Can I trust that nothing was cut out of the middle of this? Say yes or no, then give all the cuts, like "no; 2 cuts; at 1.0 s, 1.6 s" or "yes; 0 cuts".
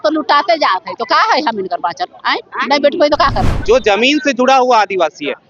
no; 1 cut; at 3.4 s